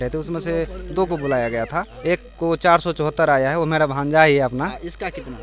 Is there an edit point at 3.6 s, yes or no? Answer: no